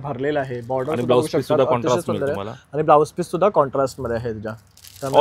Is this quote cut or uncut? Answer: uncut